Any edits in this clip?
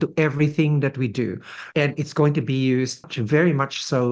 yes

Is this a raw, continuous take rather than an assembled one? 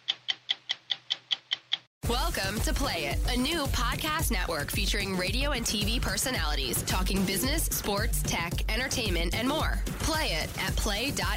no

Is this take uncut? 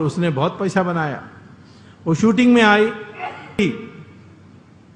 no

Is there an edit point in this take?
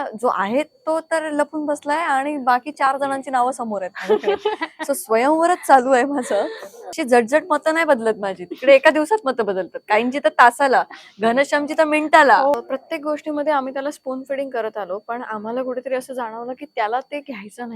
yes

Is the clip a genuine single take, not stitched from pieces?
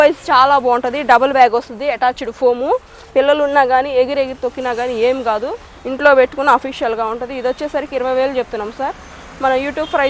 yes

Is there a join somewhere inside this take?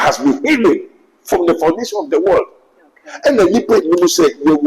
no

